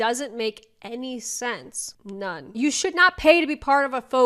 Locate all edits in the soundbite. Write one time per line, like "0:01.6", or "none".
0:02.5

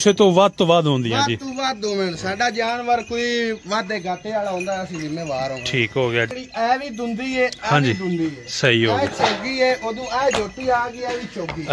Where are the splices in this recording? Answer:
0:06.3

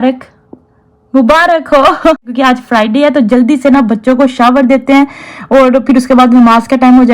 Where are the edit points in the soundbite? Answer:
0:02.3

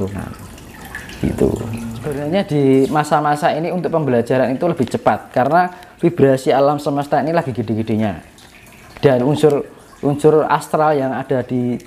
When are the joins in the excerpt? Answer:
0:02.2

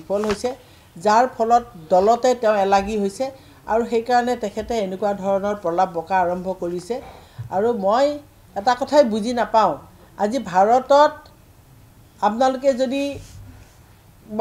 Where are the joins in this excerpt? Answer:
none

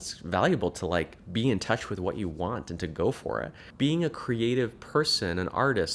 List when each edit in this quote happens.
0:03.6

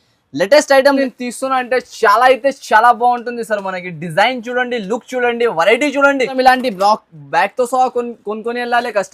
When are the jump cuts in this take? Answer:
0:01.0
0:06.3

